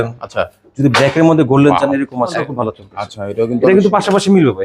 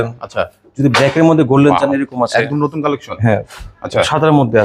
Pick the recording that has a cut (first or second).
first